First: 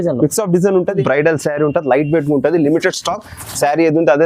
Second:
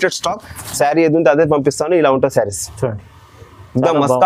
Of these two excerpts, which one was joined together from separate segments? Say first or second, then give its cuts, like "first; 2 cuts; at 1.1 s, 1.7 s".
first; 1 cut; at 1.0 s